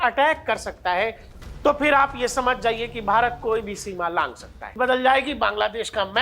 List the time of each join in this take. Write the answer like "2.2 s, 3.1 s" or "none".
1.2 s, 4.7 s